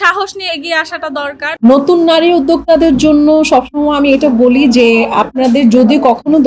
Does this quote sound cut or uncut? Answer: cut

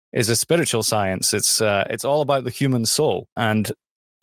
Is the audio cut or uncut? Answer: cut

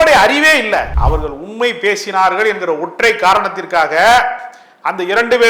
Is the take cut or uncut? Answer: cut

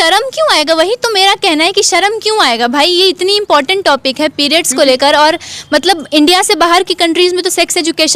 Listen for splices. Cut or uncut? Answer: uncut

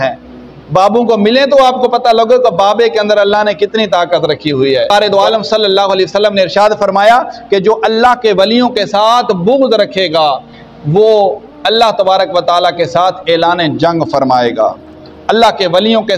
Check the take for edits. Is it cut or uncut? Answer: cut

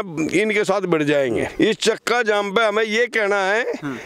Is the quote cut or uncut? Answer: cut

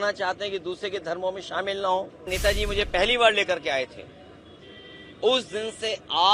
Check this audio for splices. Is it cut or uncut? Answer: cut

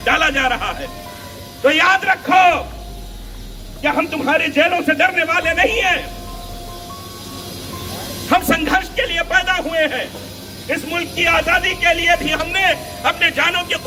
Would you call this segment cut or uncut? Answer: uncut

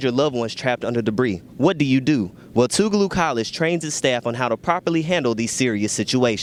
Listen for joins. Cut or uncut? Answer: uncut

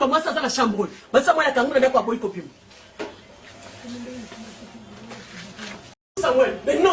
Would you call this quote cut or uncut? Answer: cut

